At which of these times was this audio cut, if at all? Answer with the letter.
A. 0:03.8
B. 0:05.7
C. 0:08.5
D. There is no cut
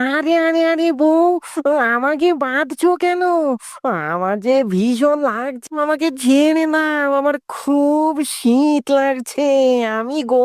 D